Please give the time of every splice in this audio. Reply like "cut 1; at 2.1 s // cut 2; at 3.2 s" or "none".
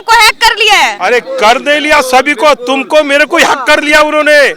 cut 1; at 1.0 s